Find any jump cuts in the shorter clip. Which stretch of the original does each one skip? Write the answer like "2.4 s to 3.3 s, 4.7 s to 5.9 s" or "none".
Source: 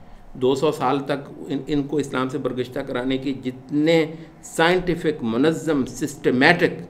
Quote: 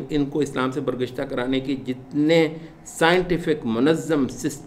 none